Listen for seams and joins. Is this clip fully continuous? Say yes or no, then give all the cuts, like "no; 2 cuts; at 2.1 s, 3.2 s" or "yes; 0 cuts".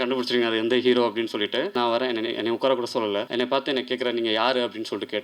no; 2 cuts; at 1.7 s, 3.3 s